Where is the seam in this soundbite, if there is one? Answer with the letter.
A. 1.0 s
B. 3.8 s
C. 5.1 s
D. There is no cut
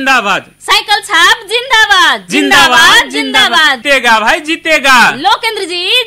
B